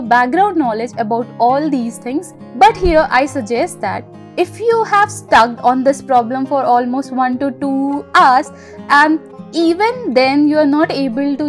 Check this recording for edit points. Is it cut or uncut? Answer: uncut